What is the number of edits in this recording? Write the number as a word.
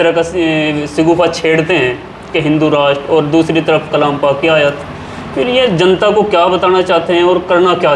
zero